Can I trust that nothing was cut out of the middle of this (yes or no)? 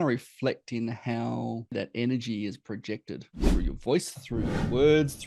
no